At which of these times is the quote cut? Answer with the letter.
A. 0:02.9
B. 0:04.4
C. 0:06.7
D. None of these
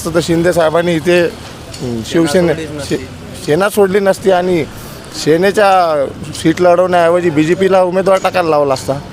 D